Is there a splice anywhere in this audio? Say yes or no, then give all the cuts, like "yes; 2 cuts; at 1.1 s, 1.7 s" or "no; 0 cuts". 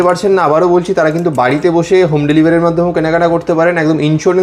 no; 0 cuts